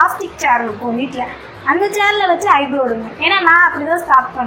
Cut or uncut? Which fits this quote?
uncut